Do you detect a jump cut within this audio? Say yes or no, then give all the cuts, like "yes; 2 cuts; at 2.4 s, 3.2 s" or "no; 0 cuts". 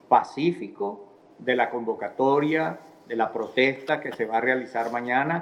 yes; 1 cut; at 3.1 s